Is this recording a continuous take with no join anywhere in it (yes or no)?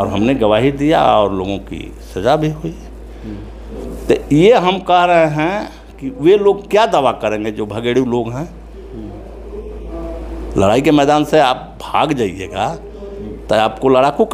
yes